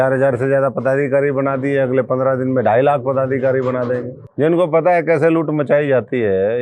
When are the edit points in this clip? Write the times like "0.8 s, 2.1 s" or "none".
4.2 s